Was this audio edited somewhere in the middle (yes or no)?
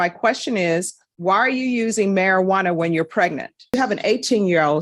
yes